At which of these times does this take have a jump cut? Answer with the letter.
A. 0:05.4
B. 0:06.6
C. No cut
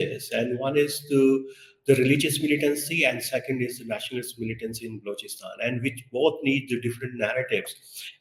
C